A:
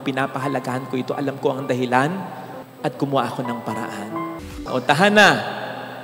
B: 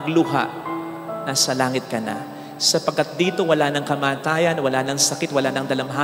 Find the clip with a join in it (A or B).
A